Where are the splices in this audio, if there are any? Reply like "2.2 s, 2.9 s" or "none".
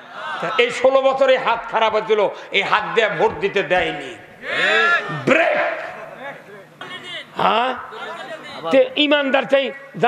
6.8 s

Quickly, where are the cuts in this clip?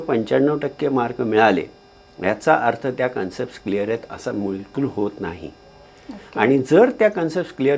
none

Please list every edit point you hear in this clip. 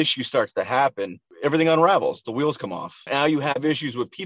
3.1 s

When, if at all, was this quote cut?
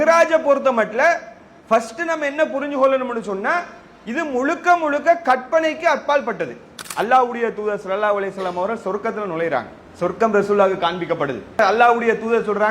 6.8 s, 9.8 s, 11.6 s

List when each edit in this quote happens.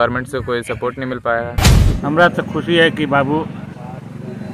1.8 s

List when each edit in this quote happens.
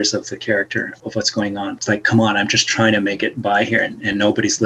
0.9 s, 1.8 s

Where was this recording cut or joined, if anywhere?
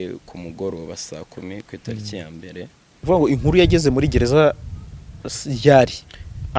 3.0 s

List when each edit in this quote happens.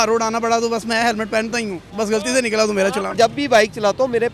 1.8 s, 3.1 s

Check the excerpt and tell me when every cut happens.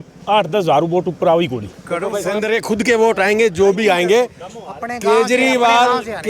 2.3 s

